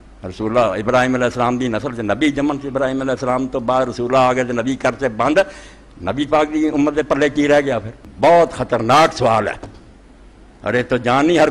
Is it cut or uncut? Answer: uncut